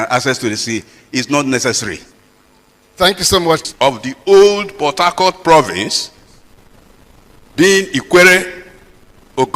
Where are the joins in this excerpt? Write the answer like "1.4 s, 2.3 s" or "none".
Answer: 3.6 s